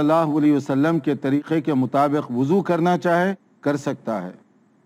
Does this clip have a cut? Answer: no; 0 cuts

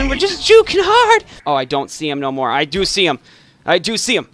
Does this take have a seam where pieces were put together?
yes; 1 cut; at 1.3 s

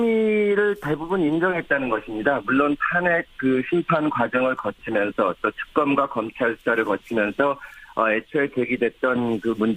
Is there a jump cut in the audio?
yes; 1 cut; at 6.0 s

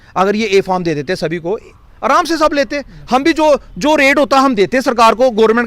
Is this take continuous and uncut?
yes; 0 cuts

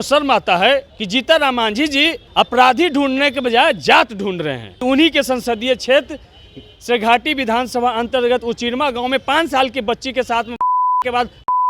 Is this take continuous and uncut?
no; 3 cuts; at 1.0 s, 2.2 s, 4.7 s

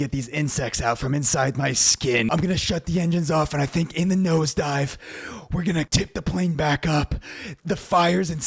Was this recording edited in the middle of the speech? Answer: yes; 3 cuts; at 2.3 s, 5.9 s, 7.5 s

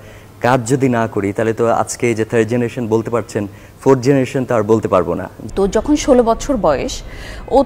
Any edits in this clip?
yes; 1 cut; at 5.3 s

